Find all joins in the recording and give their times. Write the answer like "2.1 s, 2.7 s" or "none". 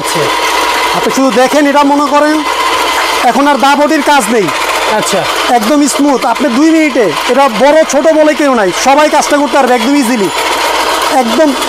none

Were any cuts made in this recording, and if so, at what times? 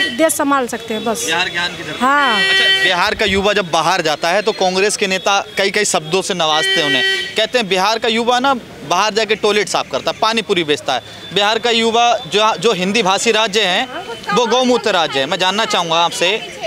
none

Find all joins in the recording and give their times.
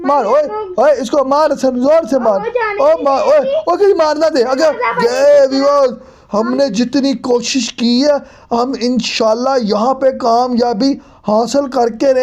5.0 s

